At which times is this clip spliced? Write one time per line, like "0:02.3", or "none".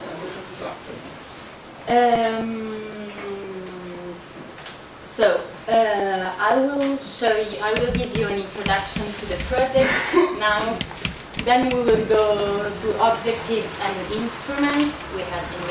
0:02.8